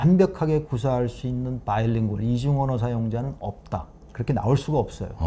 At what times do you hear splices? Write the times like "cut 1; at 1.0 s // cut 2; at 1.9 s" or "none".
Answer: cut 1; at 4.0 s